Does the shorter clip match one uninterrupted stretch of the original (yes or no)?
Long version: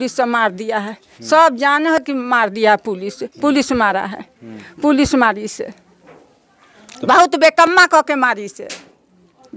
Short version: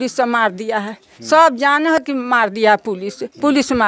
yes